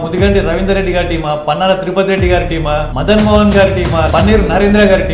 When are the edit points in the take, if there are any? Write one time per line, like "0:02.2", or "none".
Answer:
0:02.9
0:04.1